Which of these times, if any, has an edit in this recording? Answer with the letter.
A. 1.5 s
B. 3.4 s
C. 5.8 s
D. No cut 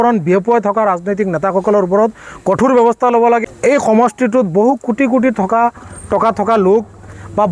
B